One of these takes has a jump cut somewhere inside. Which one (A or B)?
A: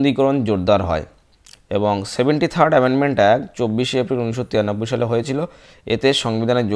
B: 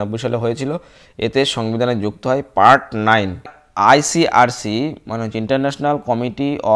B